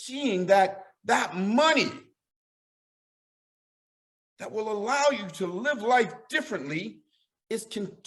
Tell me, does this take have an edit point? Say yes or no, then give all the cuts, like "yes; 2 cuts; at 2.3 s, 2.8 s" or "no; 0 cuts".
no; 0 cuts